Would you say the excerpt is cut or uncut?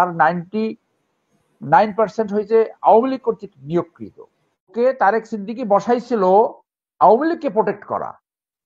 cut